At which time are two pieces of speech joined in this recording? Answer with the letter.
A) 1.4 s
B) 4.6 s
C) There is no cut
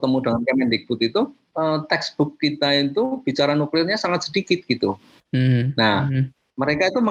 A